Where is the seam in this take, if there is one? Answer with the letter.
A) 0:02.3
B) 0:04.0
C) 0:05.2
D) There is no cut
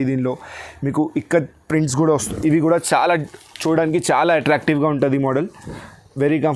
A